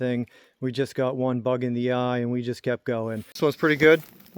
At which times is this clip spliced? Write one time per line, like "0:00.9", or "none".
0:03.4

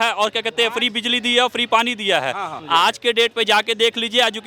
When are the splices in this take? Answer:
0:02.5

